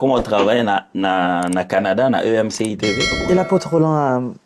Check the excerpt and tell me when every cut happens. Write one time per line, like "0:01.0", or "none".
0:03.1